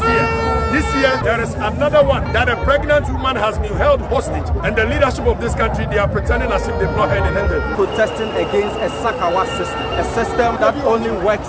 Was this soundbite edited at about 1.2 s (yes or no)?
yes